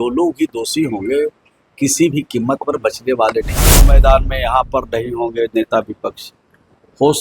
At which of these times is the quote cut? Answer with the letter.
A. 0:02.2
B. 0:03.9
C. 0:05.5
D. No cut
B